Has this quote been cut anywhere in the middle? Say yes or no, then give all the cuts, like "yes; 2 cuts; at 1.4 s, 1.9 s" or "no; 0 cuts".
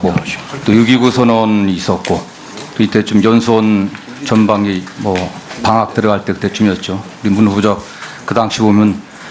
no; 0 cuts